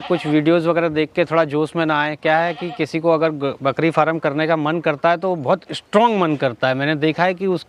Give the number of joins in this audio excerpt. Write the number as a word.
zero